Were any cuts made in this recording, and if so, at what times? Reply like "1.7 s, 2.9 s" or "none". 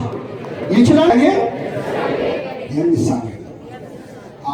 1.1 s